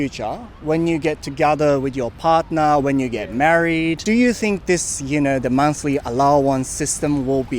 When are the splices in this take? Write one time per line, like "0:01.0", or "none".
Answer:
0:04.0